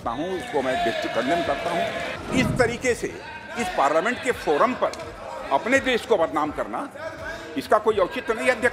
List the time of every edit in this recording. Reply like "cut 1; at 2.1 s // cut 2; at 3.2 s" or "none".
cut 1; at 2.1 s